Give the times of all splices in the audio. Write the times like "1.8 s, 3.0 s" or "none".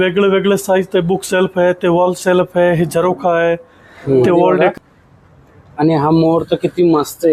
4.7 s